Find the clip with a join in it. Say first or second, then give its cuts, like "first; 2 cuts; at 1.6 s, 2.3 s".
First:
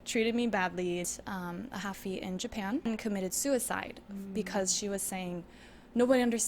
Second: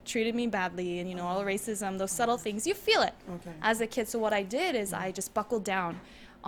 first; 2 cuts; at 1.1 s, 2.9 s